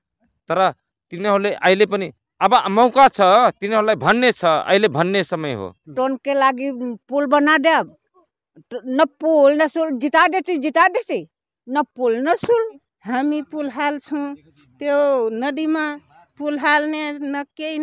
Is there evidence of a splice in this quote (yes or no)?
yes